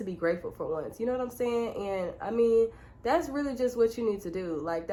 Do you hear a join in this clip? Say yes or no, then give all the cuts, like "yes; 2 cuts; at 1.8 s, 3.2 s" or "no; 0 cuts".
no; 0 cuts